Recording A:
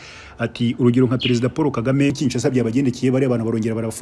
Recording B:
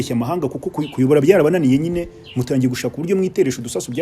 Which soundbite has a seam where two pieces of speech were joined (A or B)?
A